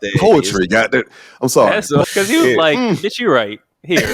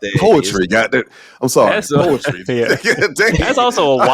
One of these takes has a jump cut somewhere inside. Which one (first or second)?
first